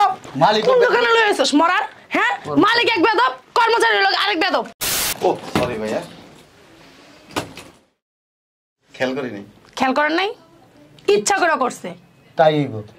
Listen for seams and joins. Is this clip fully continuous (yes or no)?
no